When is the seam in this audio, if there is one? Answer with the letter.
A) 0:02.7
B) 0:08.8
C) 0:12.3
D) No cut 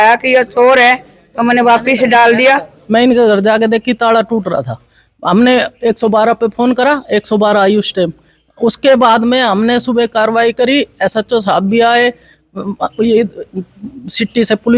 A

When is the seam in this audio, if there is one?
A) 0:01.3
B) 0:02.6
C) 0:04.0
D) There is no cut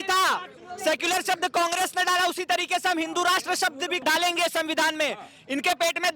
C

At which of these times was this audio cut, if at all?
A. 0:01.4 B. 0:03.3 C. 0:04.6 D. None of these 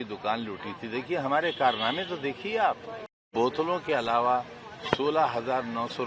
B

